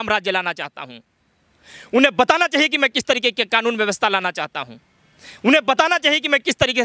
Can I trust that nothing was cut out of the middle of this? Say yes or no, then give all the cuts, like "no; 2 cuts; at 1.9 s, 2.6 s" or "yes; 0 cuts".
yes; 0 cuts